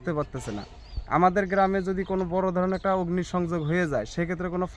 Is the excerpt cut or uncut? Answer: uncut